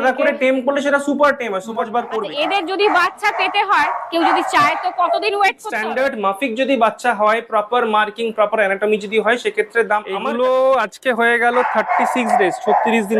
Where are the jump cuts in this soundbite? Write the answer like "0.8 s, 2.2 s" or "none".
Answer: 2.3 s, 5.7 s, 10.2 s